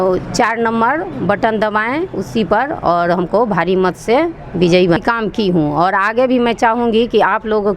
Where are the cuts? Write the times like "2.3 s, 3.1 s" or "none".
5.0 s